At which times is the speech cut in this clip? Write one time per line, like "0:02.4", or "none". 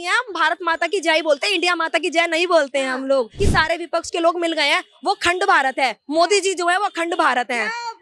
0:03.4